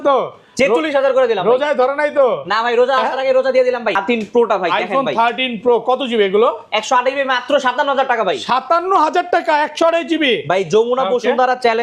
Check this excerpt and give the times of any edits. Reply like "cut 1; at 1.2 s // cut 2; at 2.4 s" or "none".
cut 1; at 4.0 s